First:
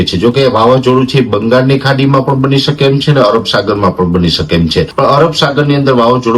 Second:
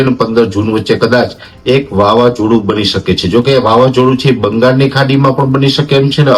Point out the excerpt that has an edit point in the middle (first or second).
first